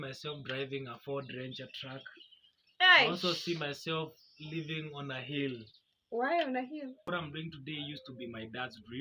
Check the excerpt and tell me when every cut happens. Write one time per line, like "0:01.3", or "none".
0:06.9